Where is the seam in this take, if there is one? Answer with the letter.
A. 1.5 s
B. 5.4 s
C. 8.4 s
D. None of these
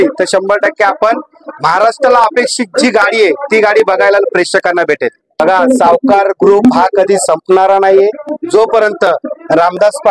B